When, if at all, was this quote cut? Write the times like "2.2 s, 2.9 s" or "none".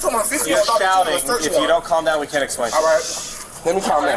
none